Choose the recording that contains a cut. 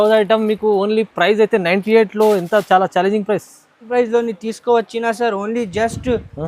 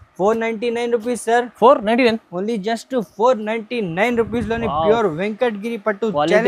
first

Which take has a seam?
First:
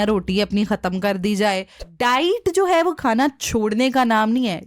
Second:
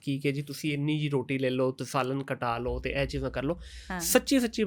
first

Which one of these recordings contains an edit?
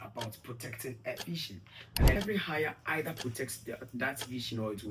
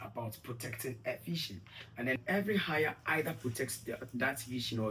first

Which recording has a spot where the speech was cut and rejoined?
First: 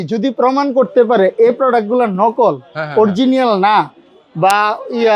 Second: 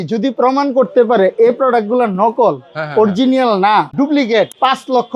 second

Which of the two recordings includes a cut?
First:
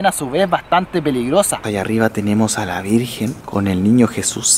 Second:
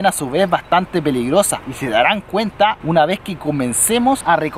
first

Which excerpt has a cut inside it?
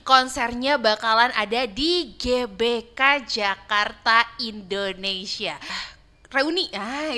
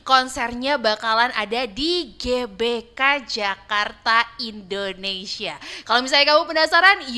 first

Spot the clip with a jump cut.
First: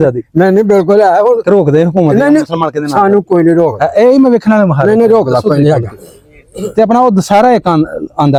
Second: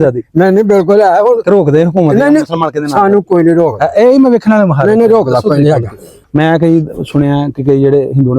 second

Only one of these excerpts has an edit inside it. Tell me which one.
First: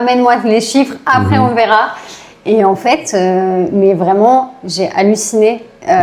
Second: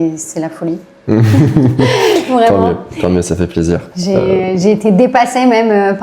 second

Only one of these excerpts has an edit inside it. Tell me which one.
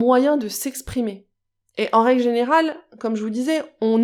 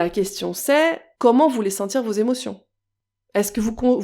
second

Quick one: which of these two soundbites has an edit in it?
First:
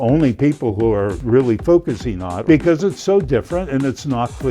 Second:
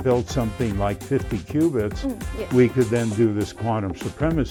first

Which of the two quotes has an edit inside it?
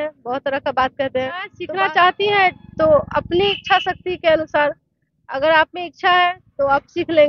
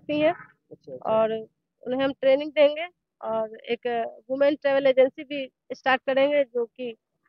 first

